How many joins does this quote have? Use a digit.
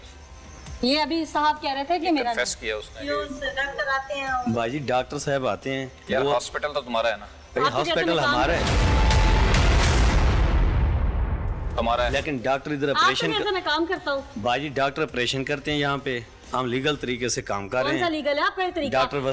0